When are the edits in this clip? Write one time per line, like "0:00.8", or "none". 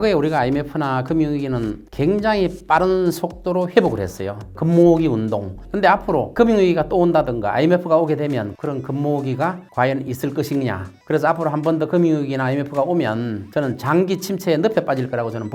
0:04.5
0:05.8
0:08.5
0:10.9